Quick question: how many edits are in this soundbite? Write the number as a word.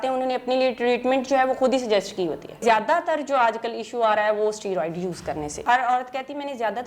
two